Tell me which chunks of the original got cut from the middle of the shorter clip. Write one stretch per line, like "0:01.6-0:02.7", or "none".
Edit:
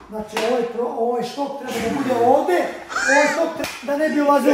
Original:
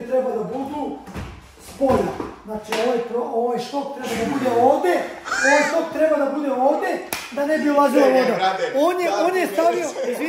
0:05.9-0:07.1